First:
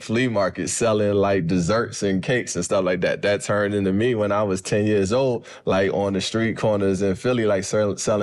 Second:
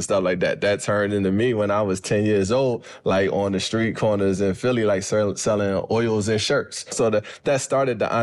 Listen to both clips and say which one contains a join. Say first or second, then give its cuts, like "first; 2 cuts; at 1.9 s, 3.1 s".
second; 1 cut; at 6.9 s